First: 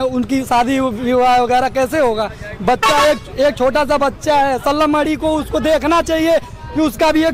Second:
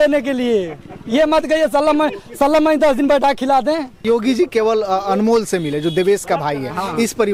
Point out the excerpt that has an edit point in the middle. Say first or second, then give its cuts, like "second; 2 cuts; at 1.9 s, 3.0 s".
second; 1 cut; at 4.0 s